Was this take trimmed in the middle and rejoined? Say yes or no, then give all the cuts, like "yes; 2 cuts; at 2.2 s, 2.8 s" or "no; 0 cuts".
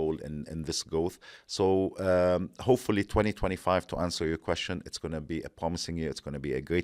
no; 0 cuts